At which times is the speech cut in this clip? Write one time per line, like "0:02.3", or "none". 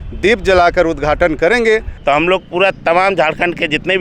0:01.9